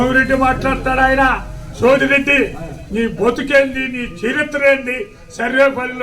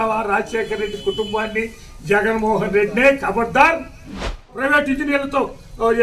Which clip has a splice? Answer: second; 1 cut; at 4.5 s

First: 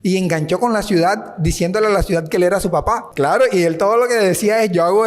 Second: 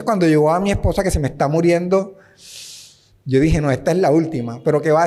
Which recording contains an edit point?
first; 1 cut; at 3.1 s

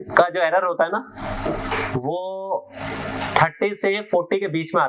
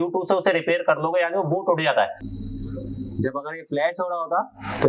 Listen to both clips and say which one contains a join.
second; 1 cut; at 2.2 s

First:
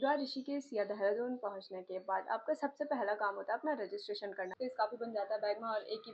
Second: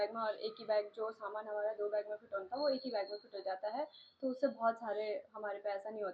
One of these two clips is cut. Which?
first; 1 cut; at 4.5 s

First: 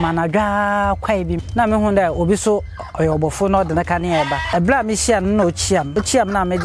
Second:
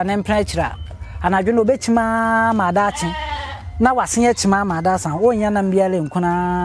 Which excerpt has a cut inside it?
first; 3 cuts; at 1.5 s, 4.4 s, 5.9 s

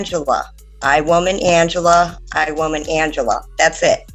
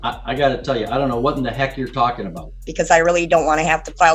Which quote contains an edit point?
second; 1 cut; at 2.7 s

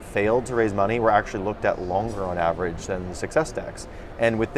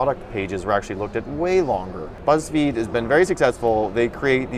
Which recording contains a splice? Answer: second; 1 cut; at 2.2 s

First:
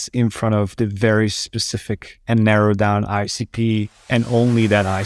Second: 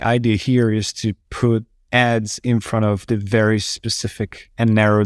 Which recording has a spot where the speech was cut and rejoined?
second; 1 cut; at 1.3 s

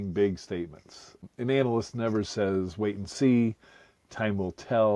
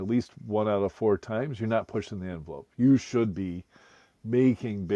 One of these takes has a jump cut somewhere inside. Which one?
first; 1 cut; at 1.2 s

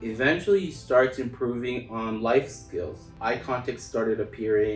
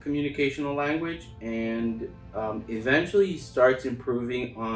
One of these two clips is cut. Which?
first; 1 cut; at 3.2 s

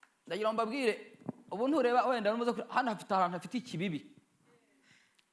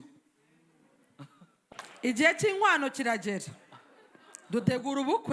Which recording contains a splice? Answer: second; 1 cut; at 1.6 s

